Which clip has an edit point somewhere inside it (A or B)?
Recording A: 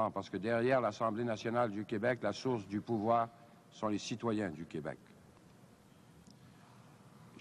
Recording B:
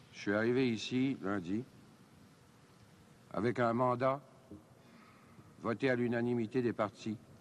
A